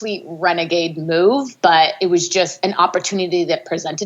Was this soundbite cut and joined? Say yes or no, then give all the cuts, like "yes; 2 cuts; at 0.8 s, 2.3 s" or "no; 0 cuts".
yes; 1 cut; at 2.3 s